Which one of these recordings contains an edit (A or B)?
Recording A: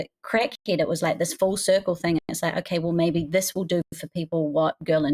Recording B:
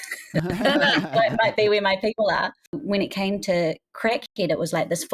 B